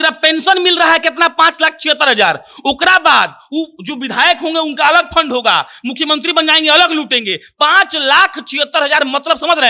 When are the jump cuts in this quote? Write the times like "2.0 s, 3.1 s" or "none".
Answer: none